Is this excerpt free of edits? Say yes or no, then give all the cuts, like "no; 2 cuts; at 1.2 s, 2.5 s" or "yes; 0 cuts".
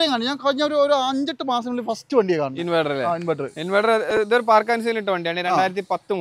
yes; 0 cuts